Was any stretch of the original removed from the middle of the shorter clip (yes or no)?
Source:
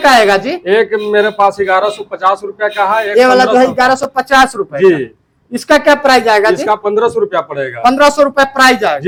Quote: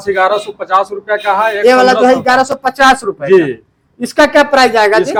no